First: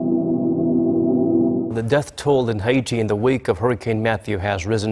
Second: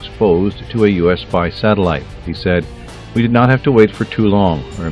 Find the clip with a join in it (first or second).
first